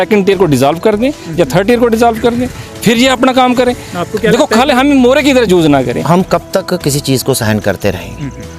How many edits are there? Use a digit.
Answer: 1